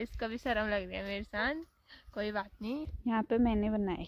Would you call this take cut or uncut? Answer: cut